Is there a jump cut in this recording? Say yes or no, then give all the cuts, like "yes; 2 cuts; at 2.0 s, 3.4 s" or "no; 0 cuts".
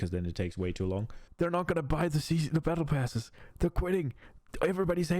yes; 1 cut; at 1.2 s